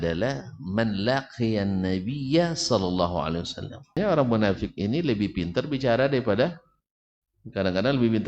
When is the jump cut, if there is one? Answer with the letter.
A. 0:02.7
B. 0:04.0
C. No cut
B